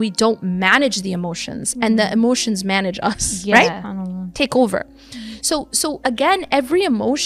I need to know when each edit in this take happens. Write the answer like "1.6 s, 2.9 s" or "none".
none